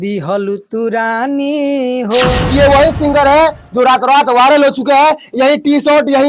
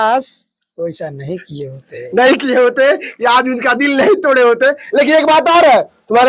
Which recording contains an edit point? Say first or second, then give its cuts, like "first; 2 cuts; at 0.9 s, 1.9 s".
first; 1 cut; at 2.3 s